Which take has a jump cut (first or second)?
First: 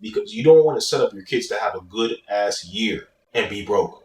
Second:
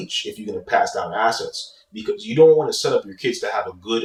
first